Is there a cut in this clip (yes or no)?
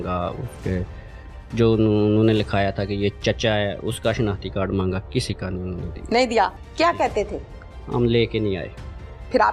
no